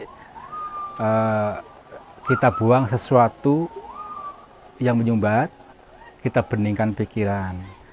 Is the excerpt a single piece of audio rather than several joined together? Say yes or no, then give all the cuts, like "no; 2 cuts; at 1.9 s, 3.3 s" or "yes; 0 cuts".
yes; 0 cuts